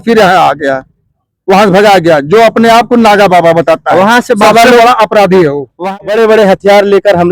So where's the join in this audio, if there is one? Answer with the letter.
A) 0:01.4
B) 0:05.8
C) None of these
B